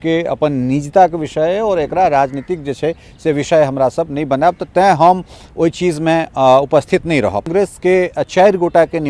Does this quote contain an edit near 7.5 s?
yes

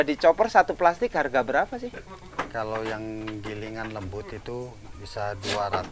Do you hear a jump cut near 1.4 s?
no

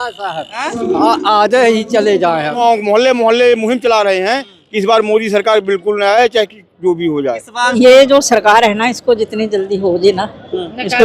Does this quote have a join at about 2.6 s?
yes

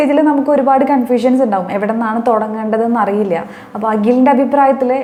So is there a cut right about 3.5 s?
no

